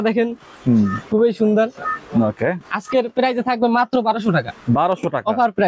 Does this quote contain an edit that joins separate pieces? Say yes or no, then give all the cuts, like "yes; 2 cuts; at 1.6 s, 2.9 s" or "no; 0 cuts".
no; 0 cuts